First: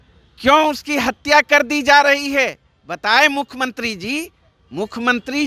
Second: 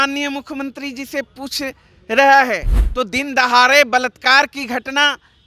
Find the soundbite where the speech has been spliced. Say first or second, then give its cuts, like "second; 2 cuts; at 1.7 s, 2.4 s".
second; 1 cut; at 2.8 s